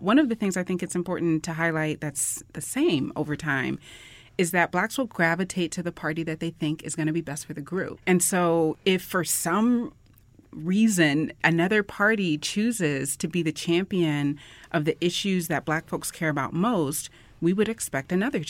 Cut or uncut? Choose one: cut